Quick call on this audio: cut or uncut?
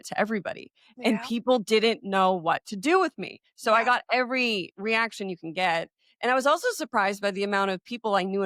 uncut